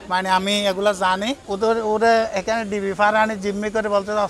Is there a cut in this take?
yes; 1 cut; at 1.5 s

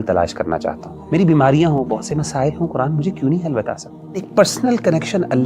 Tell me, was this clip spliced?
yes; 2 cuts; at 0.9 s, 4.3 s

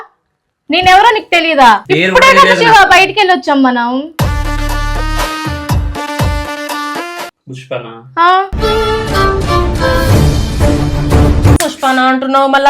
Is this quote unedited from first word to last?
no; 2 cuts; at 1.8 s, 7.3 s

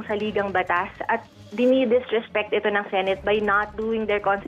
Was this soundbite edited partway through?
no; 0 cuts

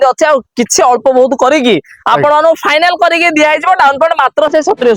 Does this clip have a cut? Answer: no; 0 cuts

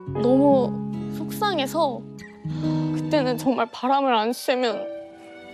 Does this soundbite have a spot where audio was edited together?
yes; 1 cut; at 3.1 s

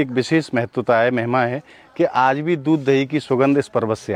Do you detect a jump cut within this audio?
no; 0 cuts

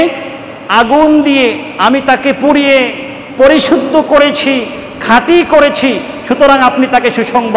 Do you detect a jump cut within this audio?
no; 0 cuts

